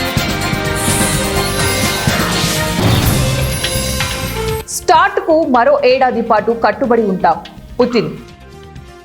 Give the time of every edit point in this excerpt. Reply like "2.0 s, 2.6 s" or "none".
4.6 s